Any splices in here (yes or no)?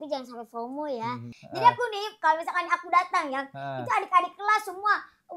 yes